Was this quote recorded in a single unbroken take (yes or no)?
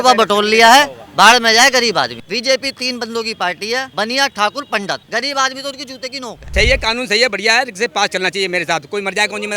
no